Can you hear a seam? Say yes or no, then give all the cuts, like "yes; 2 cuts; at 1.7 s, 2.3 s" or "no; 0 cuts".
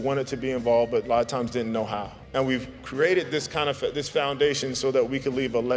yes; 1 cut; at 2.2 s